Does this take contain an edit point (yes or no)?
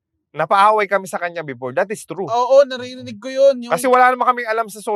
no